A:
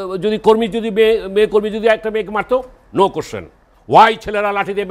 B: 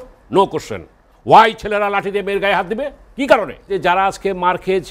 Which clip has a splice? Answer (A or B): B